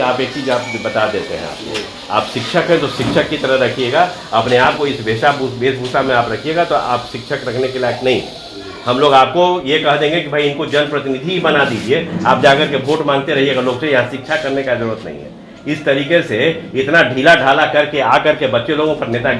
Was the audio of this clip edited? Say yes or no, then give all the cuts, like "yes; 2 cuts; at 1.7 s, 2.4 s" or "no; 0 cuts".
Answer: no; 0 cuts